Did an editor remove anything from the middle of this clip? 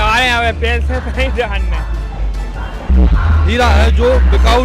yes; 1 cut; at 2.9 s

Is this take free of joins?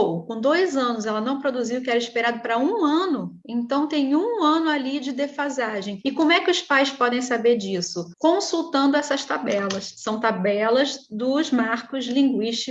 yes; 0 cuts

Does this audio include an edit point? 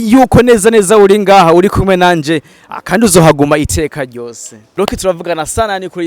yes; 1 cut; at 4.7 s

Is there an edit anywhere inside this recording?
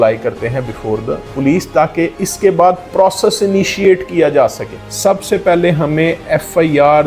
yes; 3 cuts; at 1.3 s, 2.2 s, 4.8 s

